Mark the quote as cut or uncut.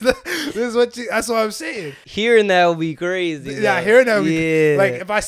cut